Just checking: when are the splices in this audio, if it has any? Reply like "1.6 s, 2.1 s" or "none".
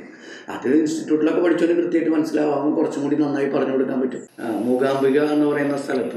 4.3 s